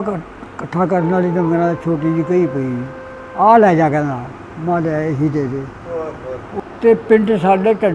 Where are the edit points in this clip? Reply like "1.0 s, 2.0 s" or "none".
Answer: 6.4 s